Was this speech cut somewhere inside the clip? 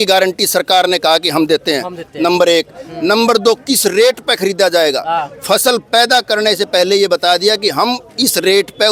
no; 0 cuts

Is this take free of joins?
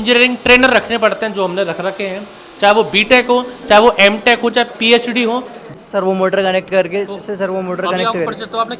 no; 1 cut; at 5.6 s

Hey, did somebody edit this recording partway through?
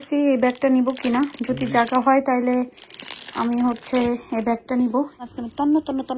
yes; 1 cut; at 5.2 s

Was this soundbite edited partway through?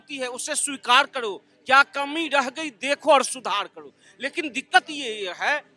no; 0 cuts

